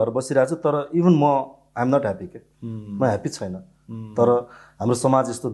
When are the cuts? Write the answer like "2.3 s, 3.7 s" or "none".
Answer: none

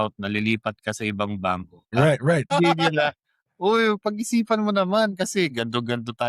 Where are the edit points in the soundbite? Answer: 1.7 s, 2.5 s

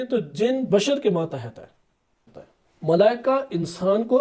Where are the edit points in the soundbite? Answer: 2.2 s

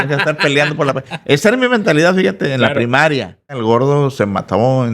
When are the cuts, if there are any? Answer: 3.5 s

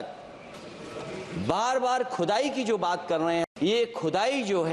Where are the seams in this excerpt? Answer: 3.5 s

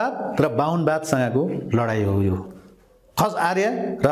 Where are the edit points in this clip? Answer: none

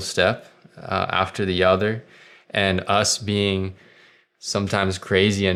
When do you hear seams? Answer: none

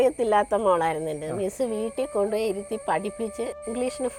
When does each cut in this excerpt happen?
none

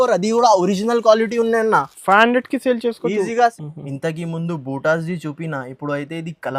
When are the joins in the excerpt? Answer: 3.5 s

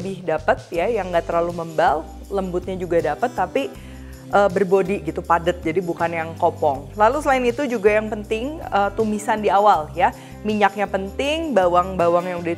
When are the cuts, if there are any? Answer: none

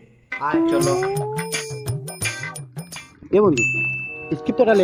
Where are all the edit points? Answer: none

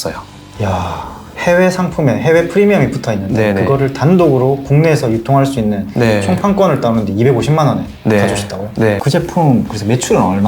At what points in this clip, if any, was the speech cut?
9.0 s

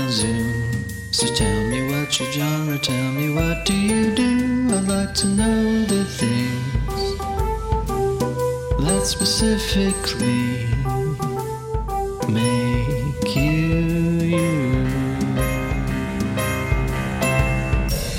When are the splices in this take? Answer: none

